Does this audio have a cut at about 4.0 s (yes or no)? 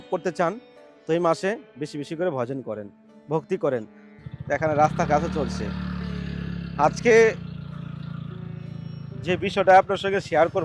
yes